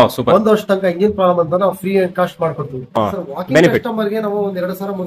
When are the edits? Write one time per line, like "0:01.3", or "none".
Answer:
0:03.0